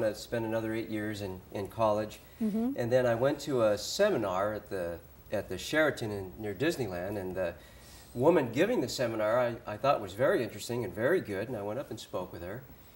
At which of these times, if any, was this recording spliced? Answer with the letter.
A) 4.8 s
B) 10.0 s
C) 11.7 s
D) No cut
A